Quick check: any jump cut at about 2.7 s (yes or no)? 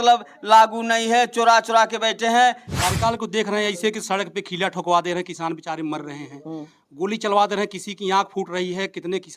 yes